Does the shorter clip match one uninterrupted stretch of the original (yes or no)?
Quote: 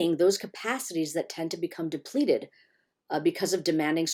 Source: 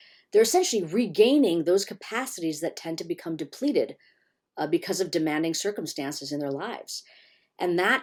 yes